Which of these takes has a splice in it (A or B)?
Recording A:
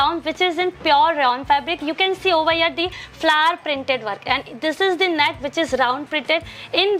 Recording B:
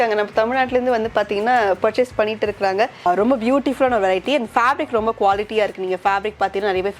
B